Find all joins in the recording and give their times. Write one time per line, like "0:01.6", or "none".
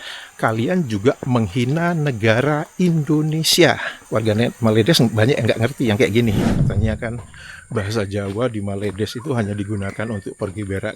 0:03.9
0:06.4